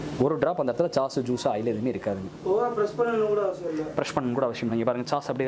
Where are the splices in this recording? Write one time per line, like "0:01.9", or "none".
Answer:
none

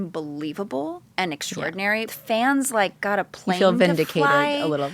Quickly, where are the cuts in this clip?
0:02.1

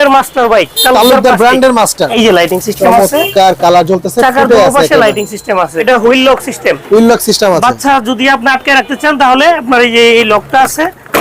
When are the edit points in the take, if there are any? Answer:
0:02.1
0:05.8

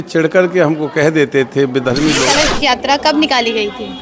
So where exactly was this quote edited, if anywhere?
0:02.2

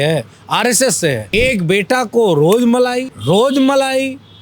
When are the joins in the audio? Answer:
0:01.3
0:03.1

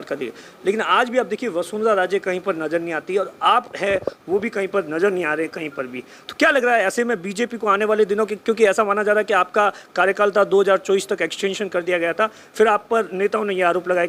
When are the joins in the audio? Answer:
none

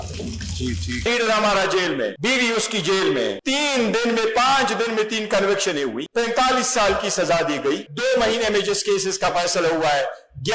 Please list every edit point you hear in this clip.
0:01.1
0:02.2
0:03.4
0:06.0
0:07.9

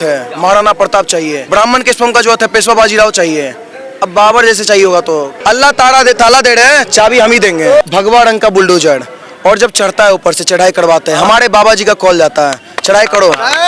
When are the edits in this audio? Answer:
0:01.4
0:05.3
0:07.8

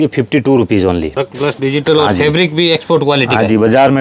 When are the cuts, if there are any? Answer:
0:01.1

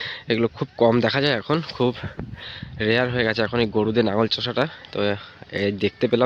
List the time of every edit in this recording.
none

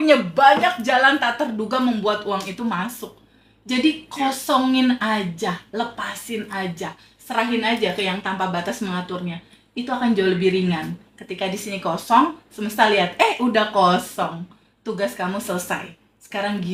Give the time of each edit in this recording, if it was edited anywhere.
none

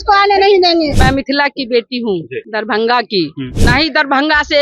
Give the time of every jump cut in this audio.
0:01.0
0:02.4
0:03.5

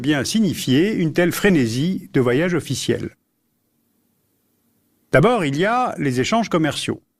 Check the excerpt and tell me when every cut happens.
0:02.2

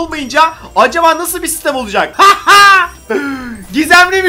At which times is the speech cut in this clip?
0:02.1

